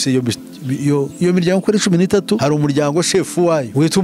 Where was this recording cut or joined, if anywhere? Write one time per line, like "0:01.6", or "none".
none